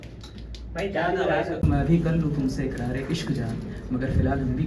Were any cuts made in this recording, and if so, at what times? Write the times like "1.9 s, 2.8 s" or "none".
1.6 s